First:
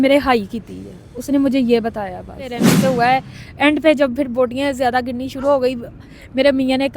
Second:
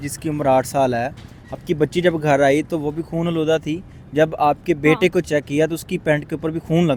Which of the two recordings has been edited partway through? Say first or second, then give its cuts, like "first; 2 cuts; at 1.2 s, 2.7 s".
first; 1 cut; at 2.6 s